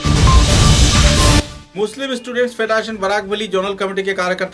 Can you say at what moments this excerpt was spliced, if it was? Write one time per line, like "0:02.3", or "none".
0:01.6